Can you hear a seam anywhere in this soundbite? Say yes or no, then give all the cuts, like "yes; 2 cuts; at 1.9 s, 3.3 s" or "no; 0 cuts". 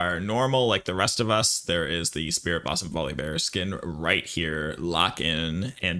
no; 0 cuts